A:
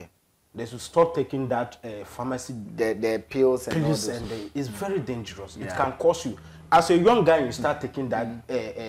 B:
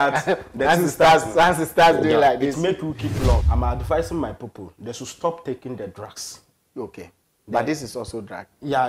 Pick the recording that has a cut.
B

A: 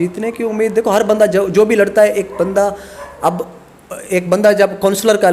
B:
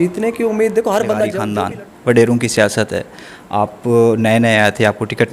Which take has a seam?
B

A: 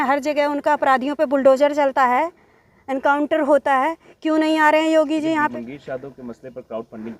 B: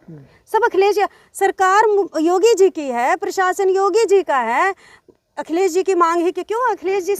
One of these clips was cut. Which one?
A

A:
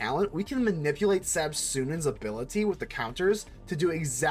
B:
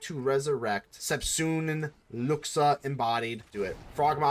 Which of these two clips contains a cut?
B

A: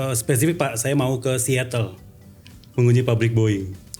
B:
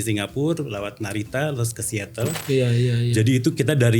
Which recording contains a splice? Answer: B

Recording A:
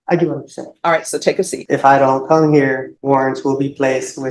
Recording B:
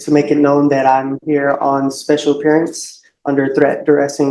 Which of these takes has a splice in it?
A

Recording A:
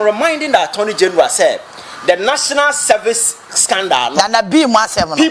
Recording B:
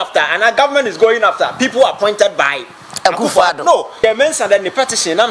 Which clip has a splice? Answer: B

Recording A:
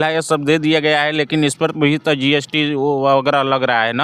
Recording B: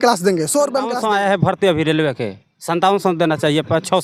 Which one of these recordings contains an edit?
B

